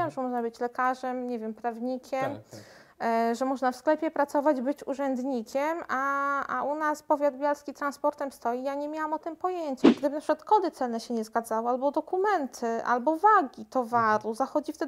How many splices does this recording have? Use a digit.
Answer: 1